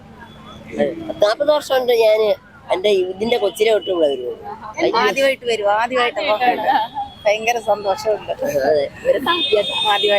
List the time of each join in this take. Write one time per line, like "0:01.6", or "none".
0:04.6